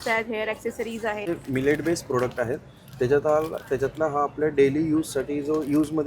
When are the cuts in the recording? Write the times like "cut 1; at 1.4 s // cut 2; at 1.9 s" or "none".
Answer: cut 1; at 1.3 s

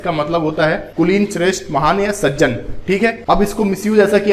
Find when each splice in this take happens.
cut 1; at 0.9 s // cut 2; at 3.2 s

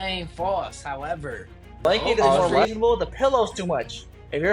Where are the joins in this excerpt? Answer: cut 1; at 2.6 s

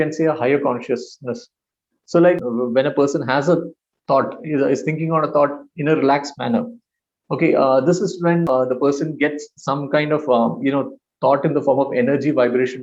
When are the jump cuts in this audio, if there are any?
cut 1; at 2.4 s // cut 2; at 8.5 s

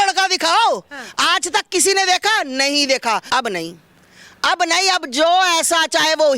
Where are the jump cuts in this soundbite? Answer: cut 1; at 3.2 s

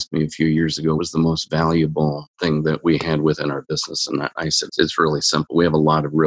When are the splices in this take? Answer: cut 1; at 1.0 s // cut 2; at 4.7 s

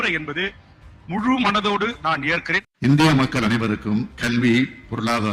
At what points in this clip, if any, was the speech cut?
cut 1; at 2.7 s

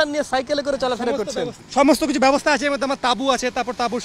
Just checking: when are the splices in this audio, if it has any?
cut 1; at 1.6 s

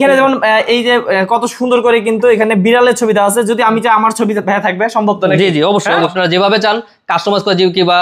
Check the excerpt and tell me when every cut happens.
cut 1; at 6.1 s

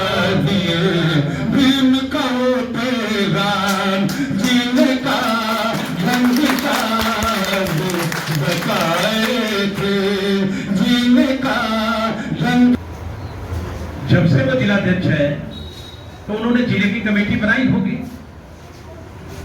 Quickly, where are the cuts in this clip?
cut 1; at 12.7 s

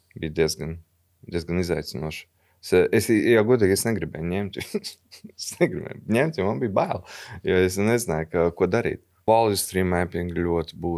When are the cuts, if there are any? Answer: cut 1; at 9.2 s

